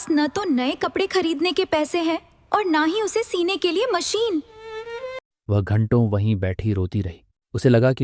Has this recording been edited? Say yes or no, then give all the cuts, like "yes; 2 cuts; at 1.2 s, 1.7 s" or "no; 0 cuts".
no; 0 cuts